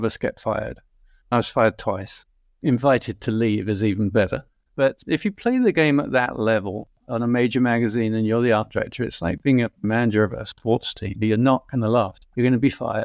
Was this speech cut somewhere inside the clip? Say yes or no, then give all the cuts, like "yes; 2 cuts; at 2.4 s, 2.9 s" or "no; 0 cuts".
yes; 2 cuts; at 1.3 s, 4.9 s